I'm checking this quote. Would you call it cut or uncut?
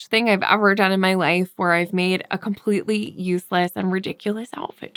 uncut